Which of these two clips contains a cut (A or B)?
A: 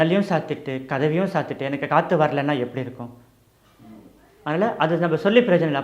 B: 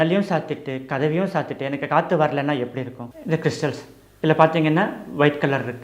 B